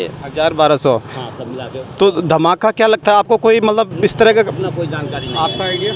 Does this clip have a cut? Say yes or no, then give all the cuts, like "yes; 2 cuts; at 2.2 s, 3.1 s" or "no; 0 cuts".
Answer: no; 0 cuts